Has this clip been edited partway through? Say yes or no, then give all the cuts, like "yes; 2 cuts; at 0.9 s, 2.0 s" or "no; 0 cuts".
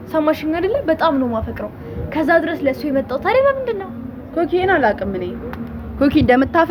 no; 0 cuts